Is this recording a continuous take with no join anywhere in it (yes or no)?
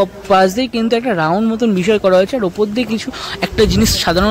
yes